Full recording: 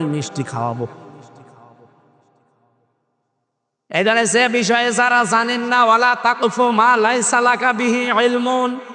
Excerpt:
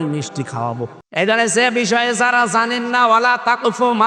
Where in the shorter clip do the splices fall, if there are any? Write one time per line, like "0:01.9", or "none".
0:01.0